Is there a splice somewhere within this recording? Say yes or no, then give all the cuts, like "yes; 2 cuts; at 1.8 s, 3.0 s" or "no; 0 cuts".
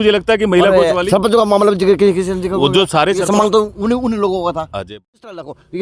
yes; 1 cut; at 4.8 s